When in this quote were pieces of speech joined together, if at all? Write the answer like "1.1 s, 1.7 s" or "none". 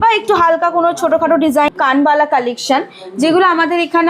1.7 s

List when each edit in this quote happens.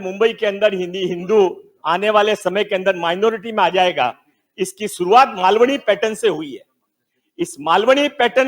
none

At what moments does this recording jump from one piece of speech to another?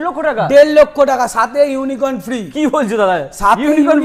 none

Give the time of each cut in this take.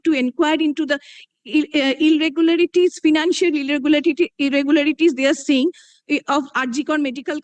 none

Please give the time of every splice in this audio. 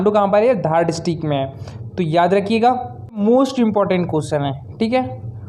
3.2 s

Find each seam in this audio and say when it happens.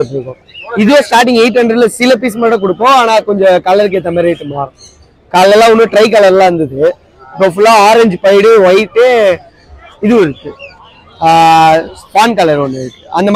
none

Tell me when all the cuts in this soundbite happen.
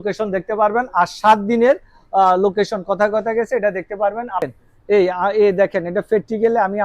4.4 s

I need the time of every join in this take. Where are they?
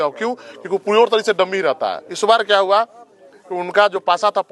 2.1 s

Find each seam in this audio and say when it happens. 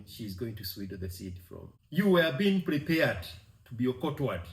1.7 s

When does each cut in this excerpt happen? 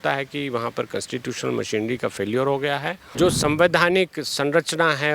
3.0 s

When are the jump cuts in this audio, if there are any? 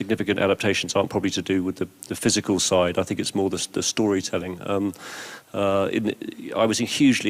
3.9 s

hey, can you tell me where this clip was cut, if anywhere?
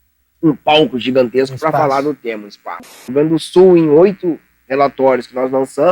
3.1 s

